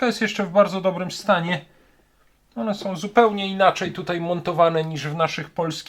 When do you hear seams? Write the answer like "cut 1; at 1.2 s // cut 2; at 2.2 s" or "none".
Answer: none